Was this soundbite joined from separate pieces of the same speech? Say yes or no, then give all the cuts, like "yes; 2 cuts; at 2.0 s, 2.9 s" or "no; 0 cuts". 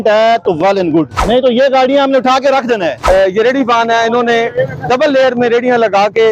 yes; 2 cuts; at 1.2 s, 3.0 s